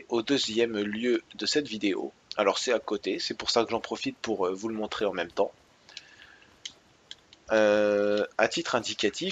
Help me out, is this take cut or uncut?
cut